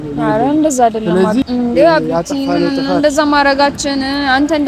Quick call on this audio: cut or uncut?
cut